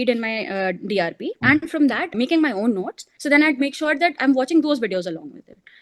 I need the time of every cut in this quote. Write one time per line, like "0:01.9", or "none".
0:01.3
0:02.1
0:03.0